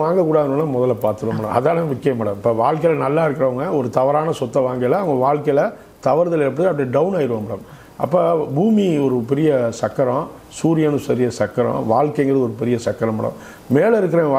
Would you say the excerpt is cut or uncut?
uncut